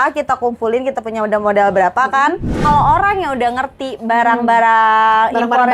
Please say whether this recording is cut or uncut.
cut